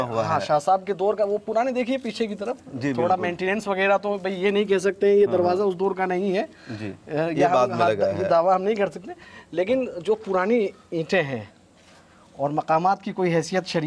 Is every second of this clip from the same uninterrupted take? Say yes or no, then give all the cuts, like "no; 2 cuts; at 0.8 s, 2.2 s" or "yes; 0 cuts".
yes; 0 cuts